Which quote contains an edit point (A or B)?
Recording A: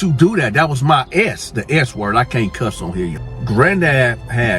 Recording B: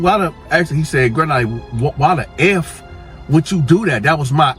A